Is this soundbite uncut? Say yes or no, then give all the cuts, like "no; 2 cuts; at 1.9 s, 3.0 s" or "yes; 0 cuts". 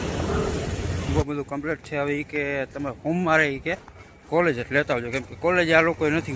no; 1 cut; at 1.1 s